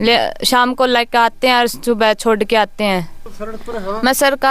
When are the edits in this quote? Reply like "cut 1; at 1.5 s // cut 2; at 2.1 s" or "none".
cut 1; at 3.2 s